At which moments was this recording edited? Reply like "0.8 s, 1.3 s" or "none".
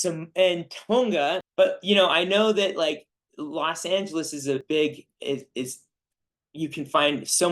1.4 s